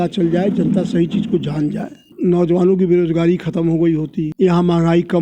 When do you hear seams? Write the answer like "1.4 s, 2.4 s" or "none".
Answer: 2.1 s, 4.3 s